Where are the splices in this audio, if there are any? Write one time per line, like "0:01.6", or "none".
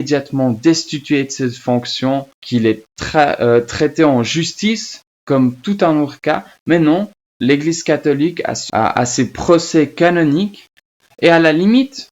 0:08.5